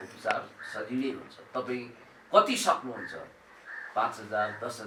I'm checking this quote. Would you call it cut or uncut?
uncut